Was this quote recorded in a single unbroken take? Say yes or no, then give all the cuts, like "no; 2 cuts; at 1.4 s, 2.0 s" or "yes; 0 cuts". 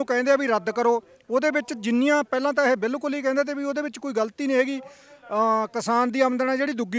yes; 0 cuts